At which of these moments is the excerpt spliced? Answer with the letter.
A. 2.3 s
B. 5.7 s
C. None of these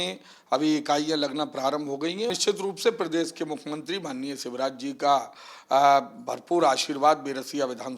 A